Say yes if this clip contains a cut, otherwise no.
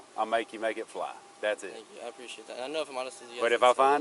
no